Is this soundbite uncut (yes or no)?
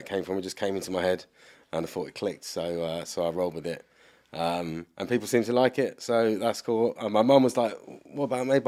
yes